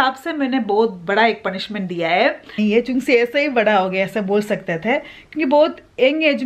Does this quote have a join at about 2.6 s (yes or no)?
yes